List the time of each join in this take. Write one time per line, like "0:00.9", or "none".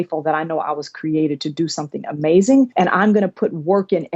0:02.7